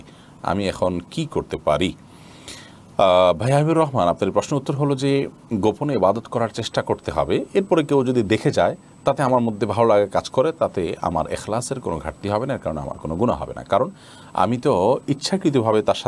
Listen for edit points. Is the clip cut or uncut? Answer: uncut